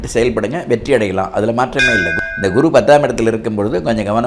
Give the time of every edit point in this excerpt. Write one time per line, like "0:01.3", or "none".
0:02.1